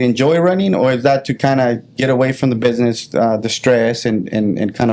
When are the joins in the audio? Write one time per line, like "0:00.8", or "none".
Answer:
none